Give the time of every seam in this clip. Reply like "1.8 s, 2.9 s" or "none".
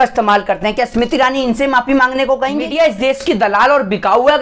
2.7 s